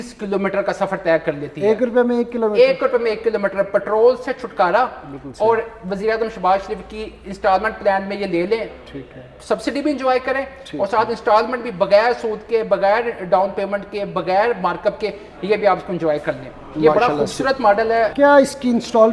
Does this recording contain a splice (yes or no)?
no